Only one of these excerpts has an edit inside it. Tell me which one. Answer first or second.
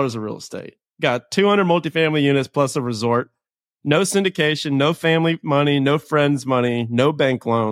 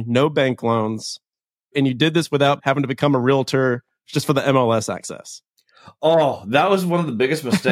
second